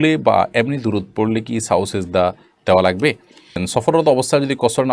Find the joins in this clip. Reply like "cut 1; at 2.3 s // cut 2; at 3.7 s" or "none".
cut 1; at 3.6 s